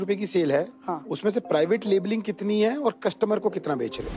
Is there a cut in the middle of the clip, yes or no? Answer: no